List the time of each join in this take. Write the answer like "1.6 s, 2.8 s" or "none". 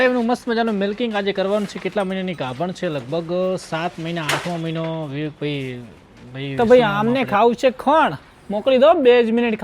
6.5 s